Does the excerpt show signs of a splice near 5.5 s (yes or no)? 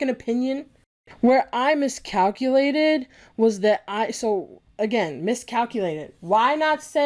no